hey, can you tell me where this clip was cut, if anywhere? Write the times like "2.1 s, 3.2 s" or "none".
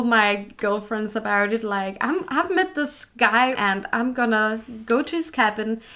3.6 s